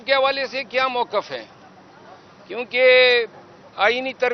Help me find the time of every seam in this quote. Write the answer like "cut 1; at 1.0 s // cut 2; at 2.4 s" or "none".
none